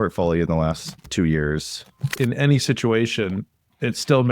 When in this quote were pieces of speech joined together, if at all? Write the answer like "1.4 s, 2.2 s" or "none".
1.1 s, 2.1 s